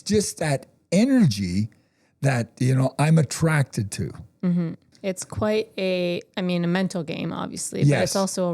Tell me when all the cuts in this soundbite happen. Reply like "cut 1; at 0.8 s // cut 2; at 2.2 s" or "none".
cut 1; at 4.9 s